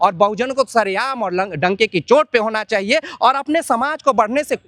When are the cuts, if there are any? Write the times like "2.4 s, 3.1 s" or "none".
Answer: none